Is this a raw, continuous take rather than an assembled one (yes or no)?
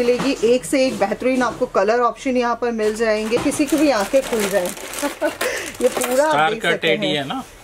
no